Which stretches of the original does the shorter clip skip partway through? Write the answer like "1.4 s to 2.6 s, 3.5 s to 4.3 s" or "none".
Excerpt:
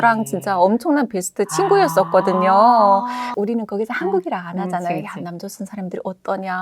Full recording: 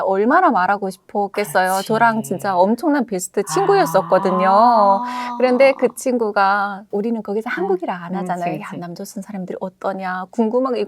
5.2 s to 6.8 s